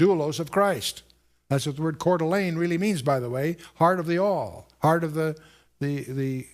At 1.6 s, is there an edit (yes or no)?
yes